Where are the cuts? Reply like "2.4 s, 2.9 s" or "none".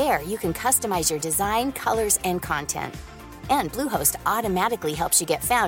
none